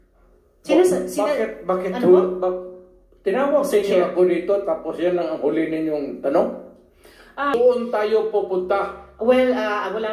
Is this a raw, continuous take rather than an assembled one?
no; 1 cut; at 7.5 s

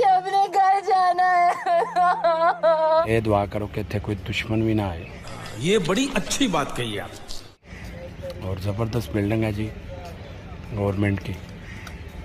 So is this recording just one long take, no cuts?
yes; 0 cuts

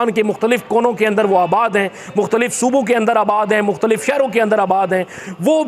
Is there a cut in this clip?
no; 0 cuts

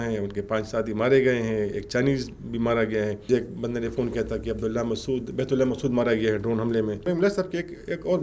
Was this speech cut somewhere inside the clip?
yes; 2 cuts; at 3.3 s, 7.0 s

